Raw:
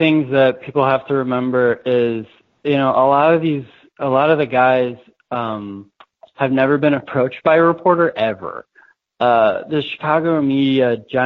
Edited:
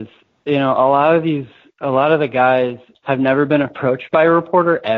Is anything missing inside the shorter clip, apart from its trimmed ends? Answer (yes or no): yes